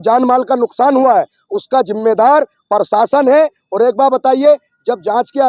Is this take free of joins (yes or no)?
yes